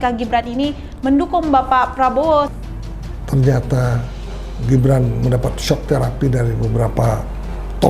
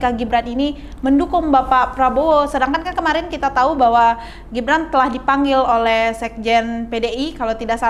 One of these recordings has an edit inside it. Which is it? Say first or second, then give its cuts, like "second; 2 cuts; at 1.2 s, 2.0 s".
first; 1 cut; at 2.5 s